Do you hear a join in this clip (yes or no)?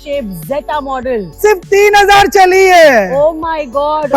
yes